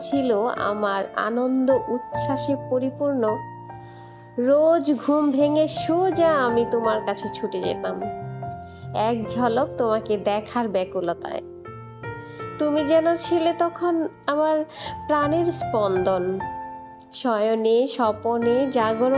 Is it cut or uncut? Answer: uncut